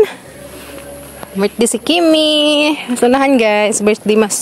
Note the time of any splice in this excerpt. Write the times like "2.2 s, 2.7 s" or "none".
none